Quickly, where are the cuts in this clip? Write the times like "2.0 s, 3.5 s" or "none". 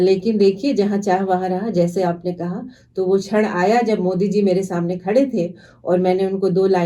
none